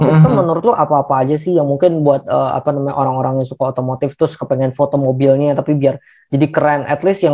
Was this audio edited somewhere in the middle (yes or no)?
no